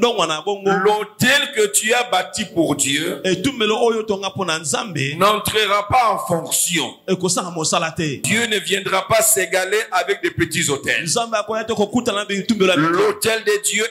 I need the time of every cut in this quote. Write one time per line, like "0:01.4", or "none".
0:08.3